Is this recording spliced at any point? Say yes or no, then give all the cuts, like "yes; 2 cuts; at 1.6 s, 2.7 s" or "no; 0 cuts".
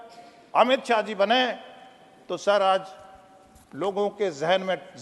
no; 0 cuts